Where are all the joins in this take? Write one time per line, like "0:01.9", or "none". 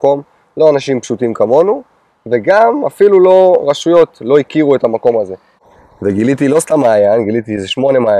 0:05.5